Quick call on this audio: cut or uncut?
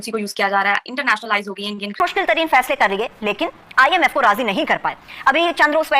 cut